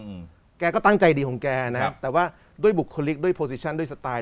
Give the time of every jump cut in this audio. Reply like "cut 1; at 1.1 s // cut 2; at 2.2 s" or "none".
none